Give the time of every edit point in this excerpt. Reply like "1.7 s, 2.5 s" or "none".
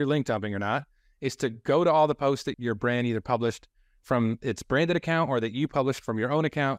2.5 s